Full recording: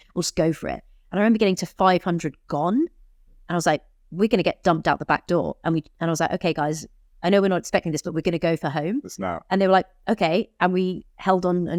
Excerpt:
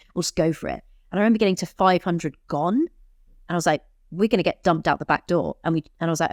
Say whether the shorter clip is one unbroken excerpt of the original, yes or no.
yes